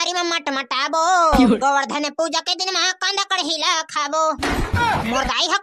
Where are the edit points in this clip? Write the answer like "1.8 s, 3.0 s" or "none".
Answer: 1.6 s